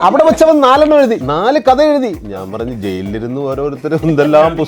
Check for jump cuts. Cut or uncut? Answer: cut